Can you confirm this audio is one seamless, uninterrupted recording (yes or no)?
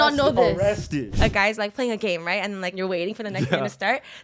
no